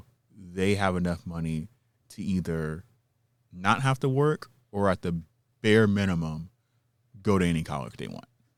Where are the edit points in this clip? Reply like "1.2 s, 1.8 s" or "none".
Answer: none